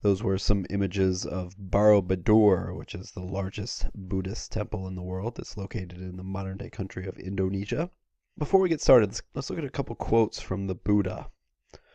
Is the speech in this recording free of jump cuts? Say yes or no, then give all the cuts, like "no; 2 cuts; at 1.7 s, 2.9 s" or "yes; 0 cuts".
yes; 0 cuts